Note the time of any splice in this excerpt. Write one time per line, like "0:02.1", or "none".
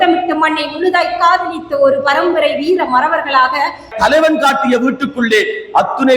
0:03.9